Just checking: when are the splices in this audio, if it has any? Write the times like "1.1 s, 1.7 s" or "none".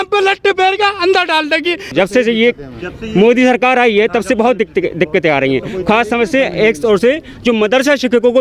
1.9 s